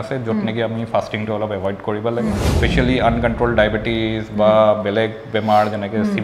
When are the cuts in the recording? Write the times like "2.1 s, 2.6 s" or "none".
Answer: 2.5 s

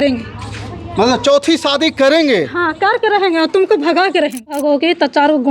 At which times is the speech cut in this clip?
4.6 s

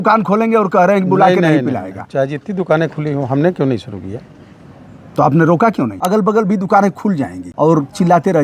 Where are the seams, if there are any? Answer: 6.0 s, 7.4 s

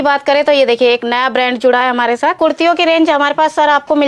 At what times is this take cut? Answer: 2.4 s

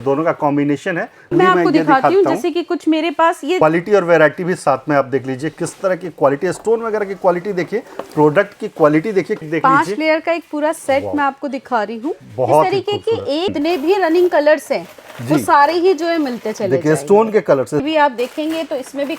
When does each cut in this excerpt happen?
1.3 s, 3.6 s, 9.4 s, 13.5 s, 17.9 s

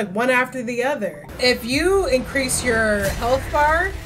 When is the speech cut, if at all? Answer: 1.2 s

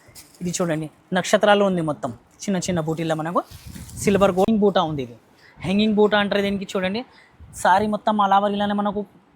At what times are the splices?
4.5 s

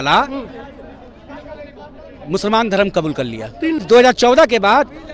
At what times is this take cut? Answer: 3.8 s

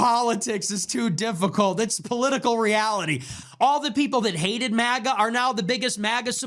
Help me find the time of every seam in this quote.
3.4 s

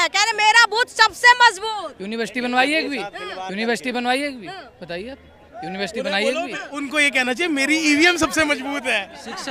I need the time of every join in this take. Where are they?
none

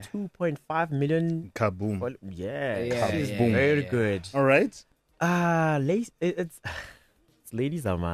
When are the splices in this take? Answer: 4.8 s

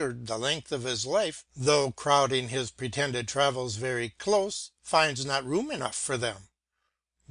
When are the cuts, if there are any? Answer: 4.4 s

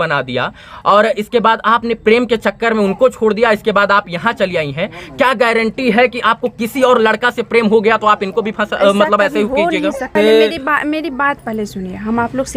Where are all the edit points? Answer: 10.1 s

